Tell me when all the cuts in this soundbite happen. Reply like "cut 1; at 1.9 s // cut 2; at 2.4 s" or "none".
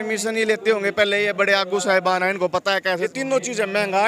cut 1; at 3.0 s